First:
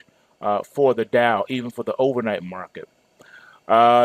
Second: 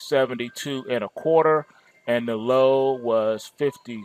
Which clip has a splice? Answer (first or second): first